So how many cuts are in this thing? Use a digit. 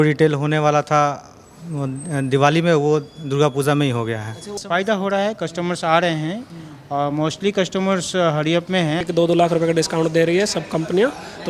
2